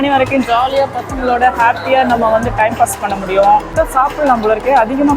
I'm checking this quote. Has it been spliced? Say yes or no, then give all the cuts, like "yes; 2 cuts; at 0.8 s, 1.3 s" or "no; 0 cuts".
yes; 1 cut; at 3.7 s